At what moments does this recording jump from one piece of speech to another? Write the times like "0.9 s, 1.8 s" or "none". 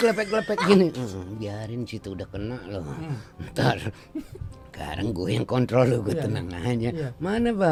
none